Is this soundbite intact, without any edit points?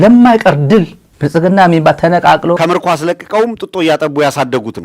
no; 1 cut; at 2.6 s

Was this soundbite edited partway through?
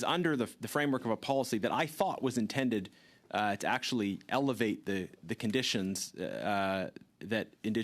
no; 0 cuts

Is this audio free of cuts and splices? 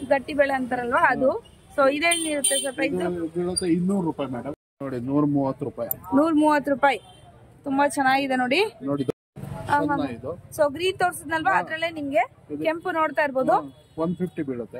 no; 2 cuts; at 4.4 s, 9.1 s

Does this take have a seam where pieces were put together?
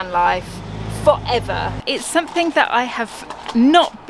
yes; 1 cut; at 1.8 s

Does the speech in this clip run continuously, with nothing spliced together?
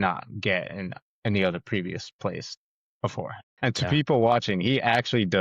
no; 1 cut; at 3.4 s

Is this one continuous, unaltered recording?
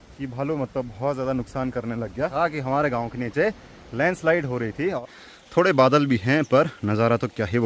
no; 2 cuts; at 2.3 s, 5.0 s

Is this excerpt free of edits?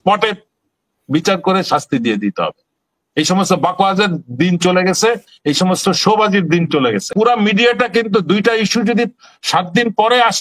no; 1 cut; at 7.1 s

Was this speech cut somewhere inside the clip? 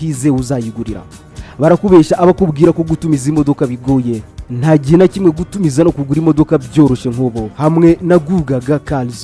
no; 0 cuts

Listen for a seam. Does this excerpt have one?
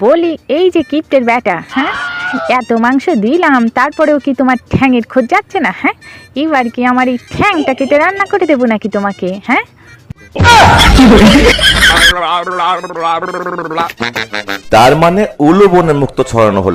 no; 0 cuts

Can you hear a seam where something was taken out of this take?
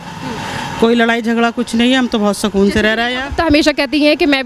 no; 0 cuts

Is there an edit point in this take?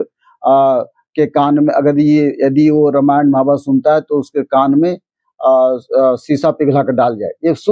no; 0 cuts

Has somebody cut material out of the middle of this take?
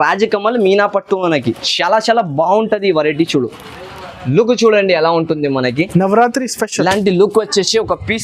no; 0 cuts

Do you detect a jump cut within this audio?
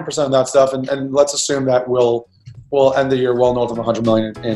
no; 0 cuts

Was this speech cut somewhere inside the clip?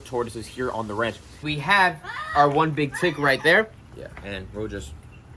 yes; 2 cuts; at 1.4 s, 3.8 s

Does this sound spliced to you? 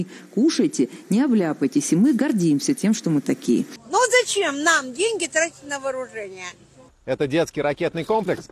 yes; 2 cuts; at 3.8 s, 7.2 s

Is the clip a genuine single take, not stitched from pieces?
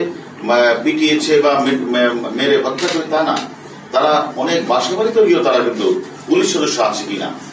yes; 0 cuts

